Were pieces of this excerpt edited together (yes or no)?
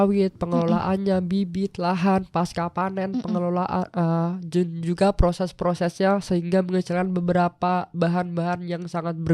no